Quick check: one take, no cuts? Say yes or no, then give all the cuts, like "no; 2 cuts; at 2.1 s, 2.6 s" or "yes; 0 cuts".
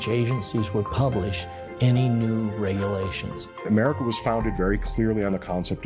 no; 1 cut; at 3.7 s